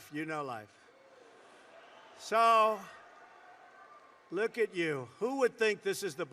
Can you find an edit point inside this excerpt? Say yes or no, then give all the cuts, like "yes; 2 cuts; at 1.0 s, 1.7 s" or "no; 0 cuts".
no; 0 cuts